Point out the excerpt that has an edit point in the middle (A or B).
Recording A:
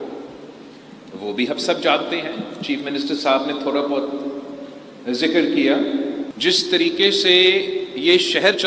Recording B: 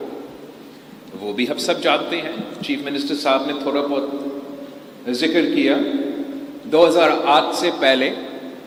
A